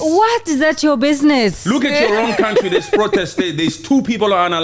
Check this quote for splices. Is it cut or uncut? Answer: uncut